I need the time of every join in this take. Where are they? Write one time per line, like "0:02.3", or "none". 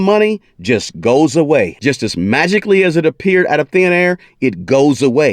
0:01.7